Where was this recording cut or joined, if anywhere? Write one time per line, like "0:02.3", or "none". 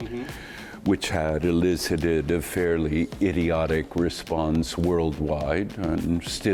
none